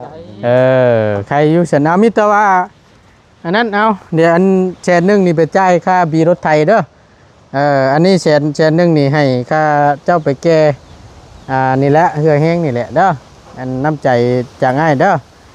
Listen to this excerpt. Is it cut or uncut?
uncut